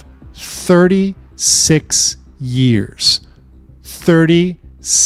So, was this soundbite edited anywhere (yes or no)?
no